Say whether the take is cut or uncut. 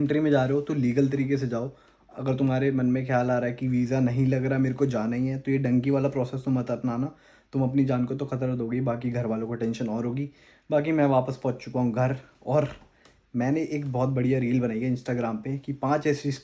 uncut